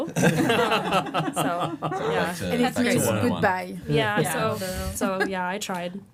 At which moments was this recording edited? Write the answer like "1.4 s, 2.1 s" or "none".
none